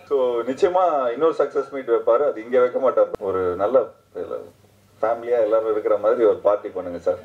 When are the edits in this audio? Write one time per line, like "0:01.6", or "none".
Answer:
0:03.1